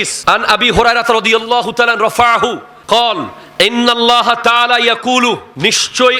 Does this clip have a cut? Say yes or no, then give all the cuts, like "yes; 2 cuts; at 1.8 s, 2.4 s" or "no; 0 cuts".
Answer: no; 0 cuts